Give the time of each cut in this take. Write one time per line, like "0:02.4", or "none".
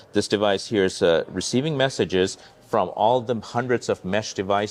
none